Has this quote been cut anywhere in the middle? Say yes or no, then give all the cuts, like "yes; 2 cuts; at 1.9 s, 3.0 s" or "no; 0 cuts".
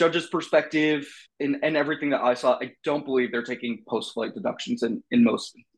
no; 0 cuts